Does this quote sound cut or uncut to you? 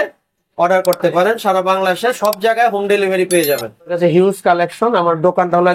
cut